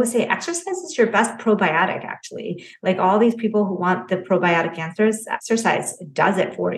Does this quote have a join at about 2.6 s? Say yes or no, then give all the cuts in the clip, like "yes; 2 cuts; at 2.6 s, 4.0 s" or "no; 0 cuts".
no; 1 cut; at 5.3 s